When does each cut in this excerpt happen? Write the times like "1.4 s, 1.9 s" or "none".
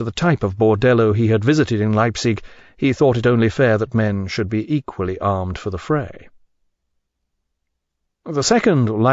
4.5 s